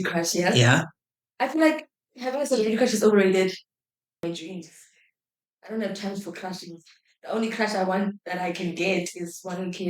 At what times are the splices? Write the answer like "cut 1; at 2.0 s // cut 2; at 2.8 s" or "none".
cut 1; at 4.2 s